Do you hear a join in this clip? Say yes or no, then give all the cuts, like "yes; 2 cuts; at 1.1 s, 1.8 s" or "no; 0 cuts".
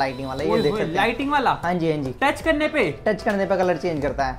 no; 0 cuts